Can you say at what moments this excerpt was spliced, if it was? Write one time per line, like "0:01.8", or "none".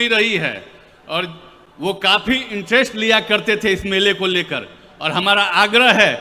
none